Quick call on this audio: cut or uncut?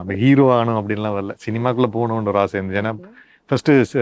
uncut